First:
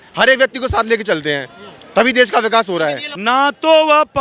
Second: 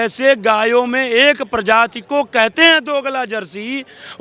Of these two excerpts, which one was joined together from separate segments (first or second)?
first